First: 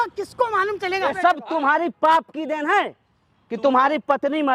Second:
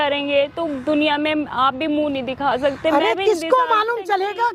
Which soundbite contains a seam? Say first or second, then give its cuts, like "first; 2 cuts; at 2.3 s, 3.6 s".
first; 1 cut; at 1.1 s